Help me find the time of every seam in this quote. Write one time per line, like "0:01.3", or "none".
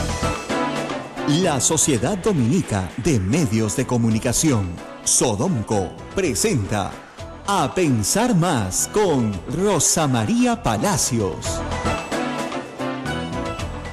0:01.1